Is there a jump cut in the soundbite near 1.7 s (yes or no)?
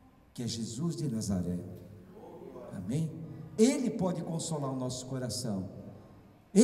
no